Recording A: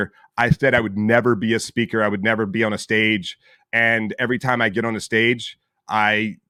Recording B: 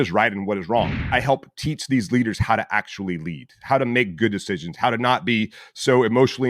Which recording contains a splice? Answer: B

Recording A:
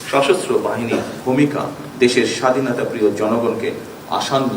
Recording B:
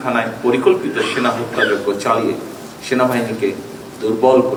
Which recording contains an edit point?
A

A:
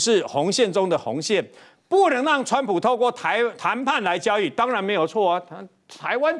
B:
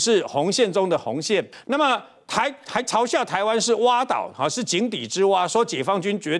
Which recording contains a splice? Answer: B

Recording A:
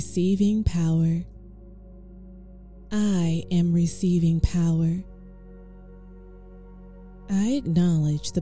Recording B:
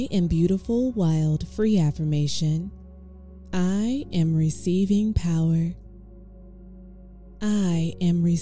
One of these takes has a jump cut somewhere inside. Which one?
A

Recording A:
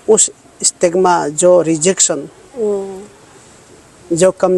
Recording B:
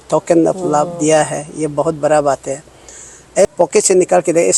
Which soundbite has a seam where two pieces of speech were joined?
B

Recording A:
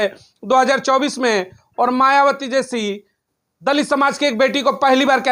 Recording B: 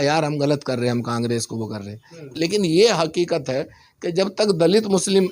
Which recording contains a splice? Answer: B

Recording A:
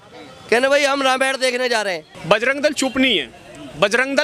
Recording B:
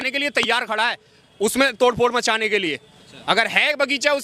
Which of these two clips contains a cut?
A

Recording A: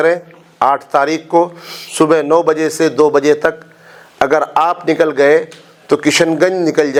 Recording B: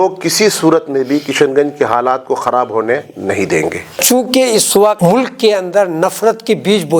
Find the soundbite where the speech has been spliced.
B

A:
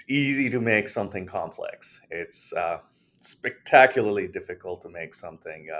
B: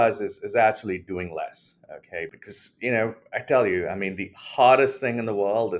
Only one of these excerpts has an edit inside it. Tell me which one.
B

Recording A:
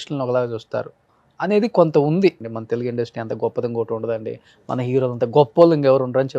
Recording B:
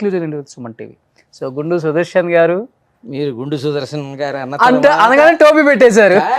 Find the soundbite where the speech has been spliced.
A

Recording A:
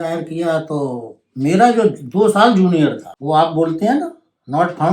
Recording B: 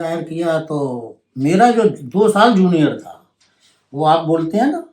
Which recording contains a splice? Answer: A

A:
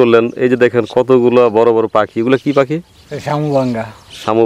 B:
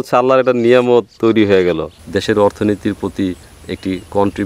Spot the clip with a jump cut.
B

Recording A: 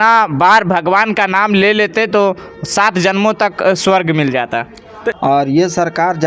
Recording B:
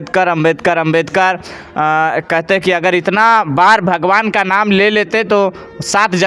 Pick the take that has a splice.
A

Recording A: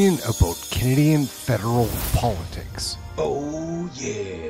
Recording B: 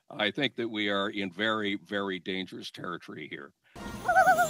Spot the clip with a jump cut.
B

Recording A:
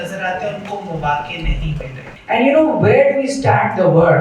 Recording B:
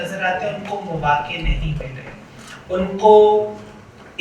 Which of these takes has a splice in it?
A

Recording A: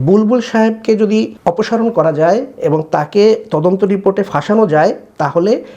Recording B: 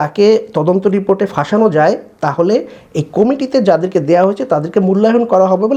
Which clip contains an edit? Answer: A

